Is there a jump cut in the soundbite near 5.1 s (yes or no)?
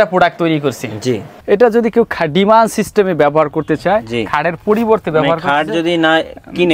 no